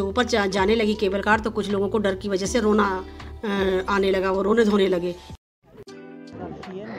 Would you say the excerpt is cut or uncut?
cut